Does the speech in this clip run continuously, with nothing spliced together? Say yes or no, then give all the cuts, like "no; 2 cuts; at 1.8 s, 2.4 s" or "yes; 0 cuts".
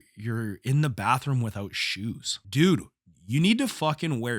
no; 1 cut; at 2.4 s